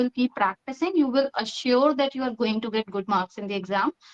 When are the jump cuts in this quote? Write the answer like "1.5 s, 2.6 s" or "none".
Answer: none